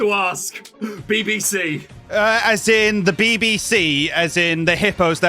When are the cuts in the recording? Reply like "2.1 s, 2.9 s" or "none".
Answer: 1.9 s